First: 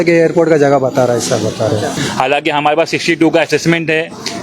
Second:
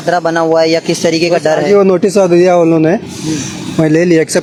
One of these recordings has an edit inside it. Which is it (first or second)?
first